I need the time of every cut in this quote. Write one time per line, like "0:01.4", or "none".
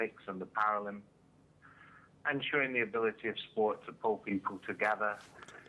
none